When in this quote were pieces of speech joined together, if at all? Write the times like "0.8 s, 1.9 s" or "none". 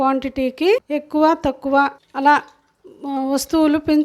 0.9 s, 2.0 s

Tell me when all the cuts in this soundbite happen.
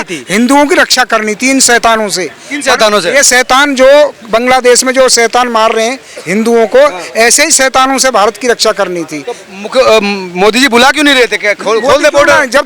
none

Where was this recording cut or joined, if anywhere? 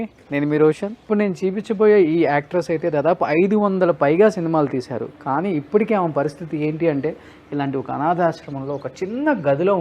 1.0 s

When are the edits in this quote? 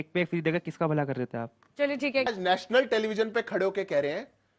2.3 s

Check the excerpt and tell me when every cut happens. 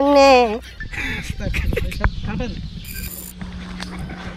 3.2 s

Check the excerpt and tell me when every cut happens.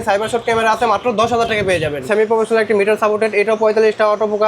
2.1 s

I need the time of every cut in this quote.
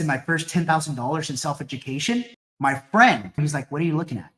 2.4 s, 3.4 s

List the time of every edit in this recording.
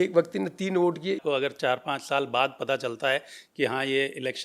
1.2 s

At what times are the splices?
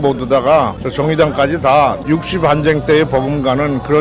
2.0 s

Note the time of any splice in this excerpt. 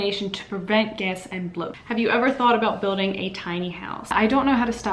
1.8 s, 4.0 s

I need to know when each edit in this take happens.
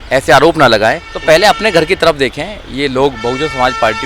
1.1 s

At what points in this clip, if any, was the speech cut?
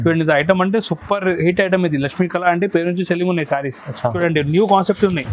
4.2 s

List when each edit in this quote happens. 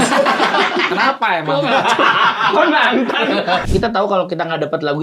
3.6 s

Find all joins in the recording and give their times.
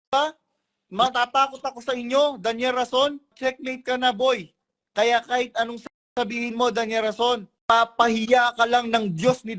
3.3 s, 7.5 s

